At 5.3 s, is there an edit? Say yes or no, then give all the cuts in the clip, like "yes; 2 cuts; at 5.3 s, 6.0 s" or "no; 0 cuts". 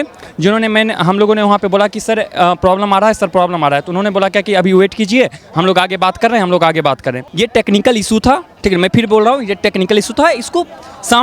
no; 1 cut; at 7.2 s